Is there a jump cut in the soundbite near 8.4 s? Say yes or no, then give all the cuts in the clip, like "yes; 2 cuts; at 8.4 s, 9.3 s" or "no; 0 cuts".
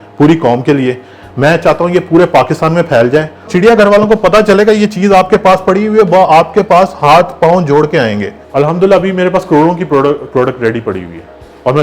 yes; 2 cuts; at 3.5 s, 8.4 s